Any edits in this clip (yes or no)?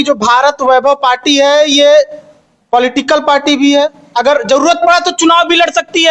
no